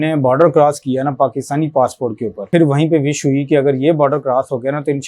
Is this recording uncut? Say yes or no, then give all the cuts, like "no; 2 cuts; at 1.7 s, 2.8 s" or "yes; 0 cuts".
no; 1 cut; at 2.4 s